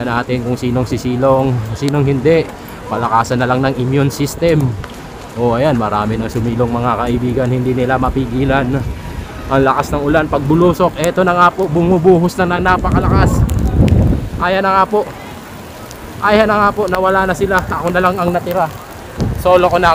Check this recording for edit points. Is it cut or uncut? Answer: uncut